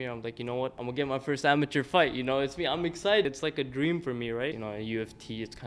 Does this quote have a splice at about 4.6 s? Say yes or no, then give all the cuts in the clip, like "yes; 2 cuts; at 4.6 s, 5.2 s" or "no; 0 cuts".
yes; 3 cuts; at 0.8 s, 3.2 s, 4.6 s